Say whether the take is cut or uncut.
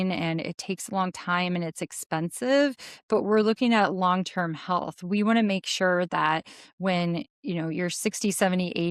uncut